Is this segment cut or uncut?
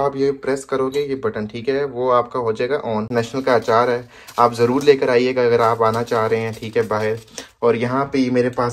cut